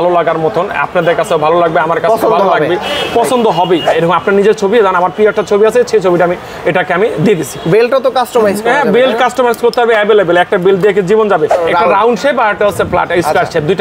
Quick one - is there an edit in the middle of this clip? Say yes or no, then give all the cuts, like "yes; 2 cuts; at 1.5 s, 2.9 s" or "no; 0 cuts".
yes; 2 cuts; at 3.9 s, 11.6 s